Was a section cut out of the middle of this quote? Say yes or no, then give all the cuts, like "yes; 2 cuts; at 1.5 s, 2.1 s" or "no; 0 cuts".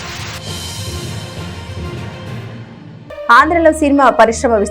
yes; 1 cut; at 2.7 s